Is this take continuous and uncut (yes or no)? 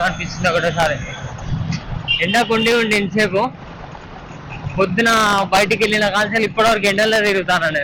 yes